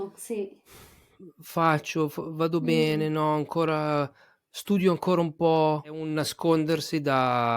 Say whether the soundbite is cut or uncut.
cut